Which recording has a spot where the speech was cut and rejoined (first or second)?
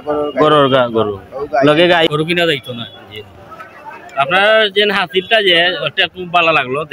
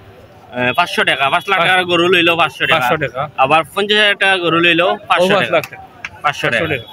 first